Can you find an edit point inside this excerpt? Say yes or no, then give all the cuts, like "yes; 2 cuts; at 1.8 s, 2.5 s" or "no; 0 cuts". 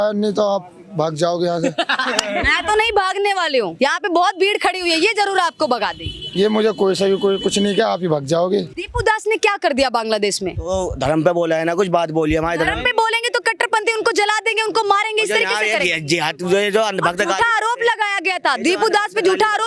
yes; 2 cuts; at 3.7 s, 8.7 s